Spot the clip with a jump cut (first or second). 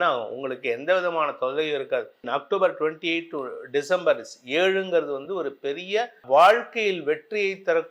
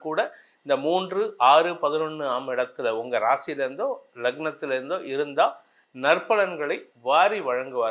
first